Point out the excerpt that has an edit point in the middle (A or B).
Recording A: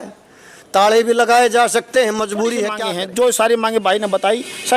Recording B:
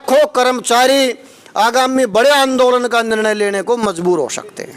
A